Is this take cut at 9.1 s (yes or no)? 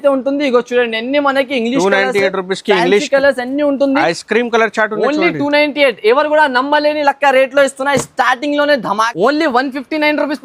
yes